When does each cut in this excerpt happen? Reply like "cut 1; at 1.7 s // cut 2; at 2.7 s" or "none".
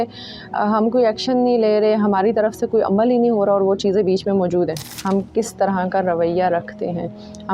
cut 1; at 4.9 s